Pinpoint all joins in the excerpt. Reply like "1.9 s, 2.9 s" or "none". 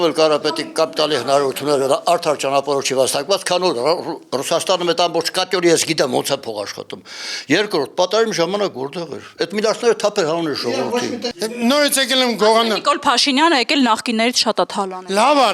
11.2 s